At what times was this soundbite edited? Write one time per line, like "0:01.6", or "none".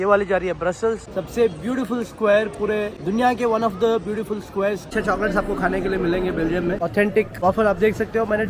0:01.0
0:03.0
0:04.9
0:07.0